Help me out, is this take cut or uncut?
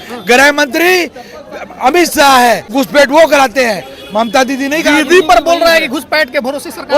cut